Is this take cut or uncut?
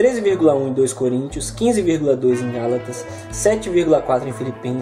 cut